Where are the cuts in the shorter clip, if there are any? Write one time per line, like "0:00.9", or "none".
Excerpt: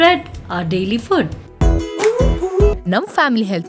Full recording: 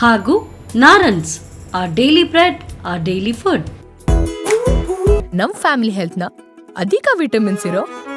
0:01.4